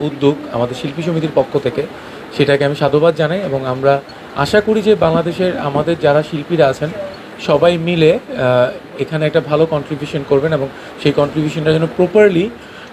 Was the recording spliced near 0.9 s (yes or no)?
yes